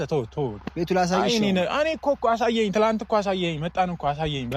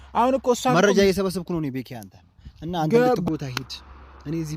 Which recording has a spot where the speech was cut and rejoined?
second; 1 cut; at 3.2 s

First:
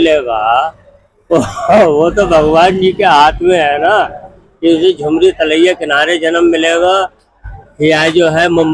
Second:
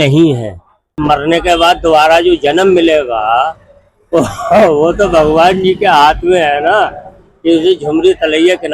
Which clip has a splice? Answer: second; 1 cut; at 1.0 s

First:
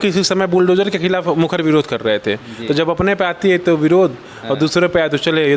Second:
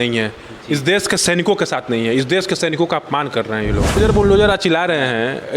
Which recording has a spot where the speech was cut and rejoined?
second; 1 cut; at 4.0 s

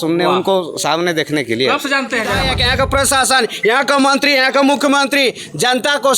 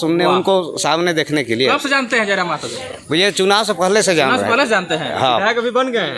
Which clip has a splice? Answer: first; 1 cut; at 2.5 s

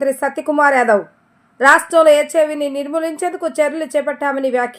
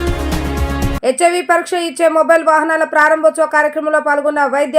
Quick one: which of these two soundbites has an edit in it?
second; 1 cut; at 0.9 s

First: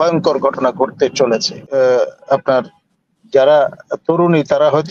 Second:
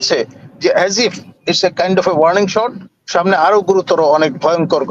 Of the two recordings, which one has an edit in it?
first; 1 cut; at 1.6 s

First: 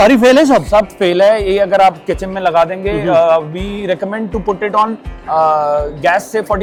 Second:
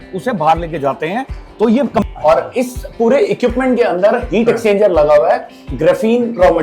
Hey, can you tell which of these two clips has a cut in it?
second; 1 cut; at 2.1 s

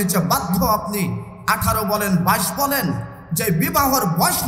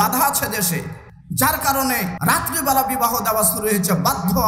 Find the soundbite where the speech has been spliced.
second; 1 cut; at 2.1 s

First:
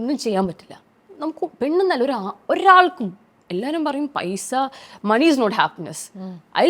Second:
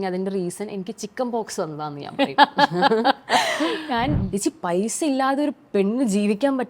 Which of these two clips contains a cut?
second; 1 cut; at 4.2 s

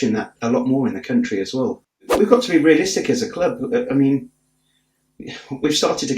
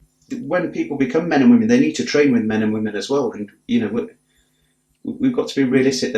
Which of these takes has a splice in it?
first; 1 cut; at 2.0 s

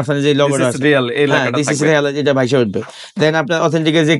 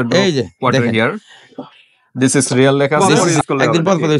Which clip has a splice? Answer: second; 1 cut; at 3.3 s

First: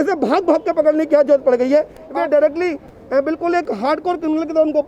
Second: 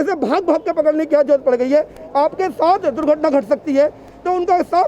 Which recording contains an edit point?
first; 1 cut; at 2.0 s

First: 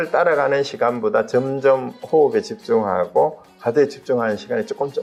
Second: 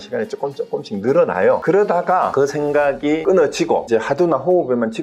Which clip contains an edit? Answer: second; 4 cuts; at 1.6 s, 2.3 s, 3.2 s, 3.9 s

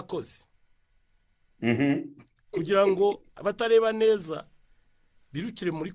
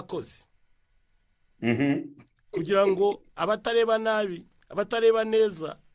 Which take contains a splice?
first; 1 cut; at 3.3 s

